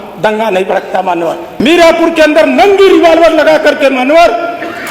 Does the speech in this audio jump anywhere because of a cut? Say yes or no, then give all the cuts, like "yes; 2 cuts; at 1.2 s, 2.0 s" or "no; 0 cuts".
yes; 1 cut; at 1.5 s